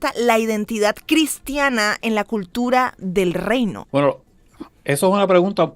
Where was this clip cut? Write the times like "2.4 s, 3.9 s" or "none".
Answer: 1.0 s, 3.8 s